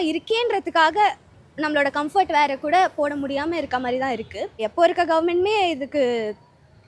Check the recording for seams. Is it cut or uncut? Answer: cut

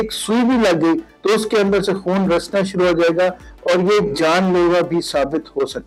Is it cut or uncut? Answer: uncut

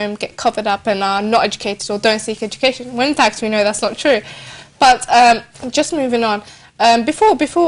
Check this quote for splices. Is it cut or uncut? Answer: cut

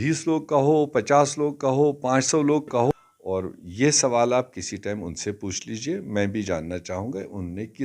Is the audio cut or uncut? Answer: cut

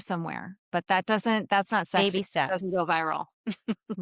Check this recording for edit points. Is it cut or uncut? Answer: uncut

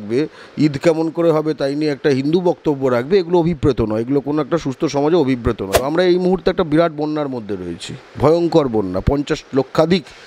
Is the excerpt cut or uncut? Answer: cut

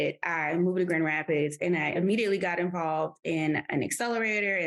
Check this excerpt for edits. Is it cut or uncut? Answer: cut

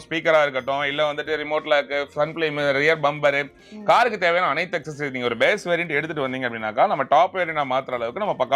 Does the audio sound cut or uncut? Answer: uncut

